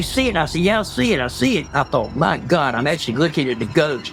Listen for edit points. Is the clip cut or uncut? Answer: uncut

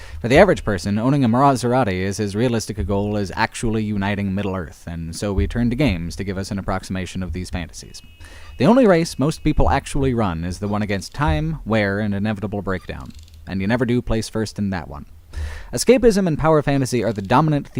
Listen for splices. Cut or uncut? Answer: uncut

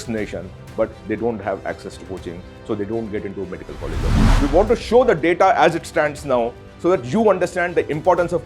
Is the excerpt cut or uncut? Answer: cut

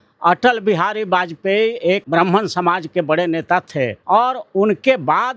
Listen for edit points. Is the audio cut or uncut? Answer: cut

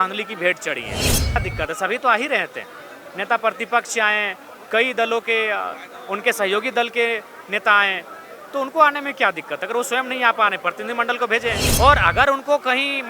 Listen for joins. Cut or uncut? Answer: cut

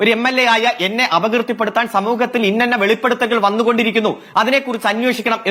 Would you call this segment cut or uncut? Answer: uncut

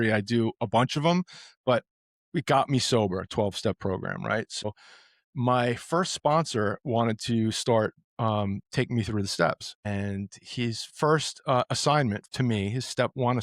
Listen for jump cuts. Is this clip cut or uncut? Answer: cut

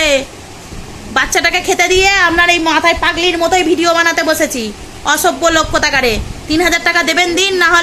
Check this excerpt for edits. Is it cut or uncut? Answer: uncut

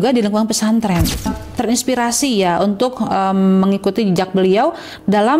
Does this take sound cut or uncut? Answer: cut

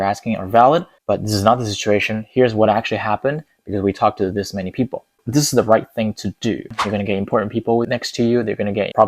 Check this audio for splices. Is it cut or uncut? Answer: cut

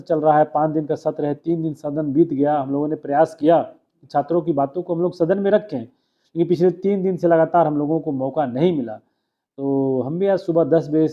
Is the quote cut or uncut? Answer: uncut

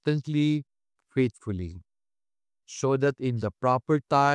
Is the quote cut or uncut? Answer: uncut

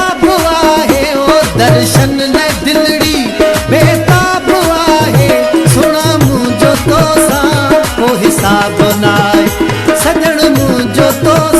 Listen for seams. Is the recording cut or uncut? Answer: uncut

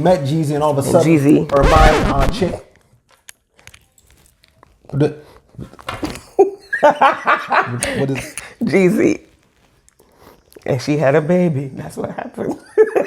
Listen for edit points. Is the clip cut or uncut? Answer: uncut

